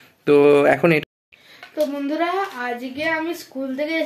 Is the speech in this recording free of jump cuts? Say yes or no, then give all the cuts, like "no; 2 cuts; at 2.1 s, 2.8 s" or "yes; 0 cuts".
no; 1 cut; at 1.0 s